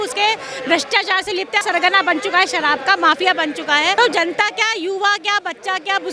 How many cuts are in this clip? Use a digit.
2